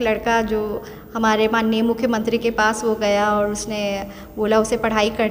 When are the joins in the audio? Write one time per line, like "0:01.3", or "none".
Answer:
none